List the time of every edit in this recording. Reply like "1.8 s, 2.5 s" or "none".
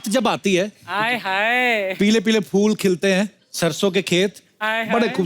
2.0 s, 3.4 s